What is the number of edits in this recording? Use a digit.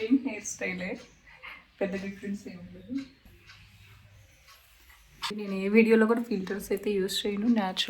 2